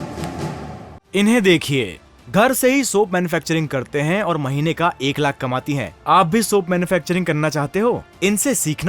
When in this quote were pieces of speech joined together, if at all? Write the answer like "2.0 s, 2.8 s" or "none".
0.9 s